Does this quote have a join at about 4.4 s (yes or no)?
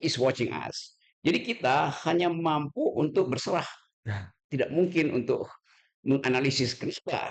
no